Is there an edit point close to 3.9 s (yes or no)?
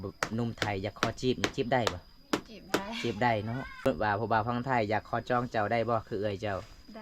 yes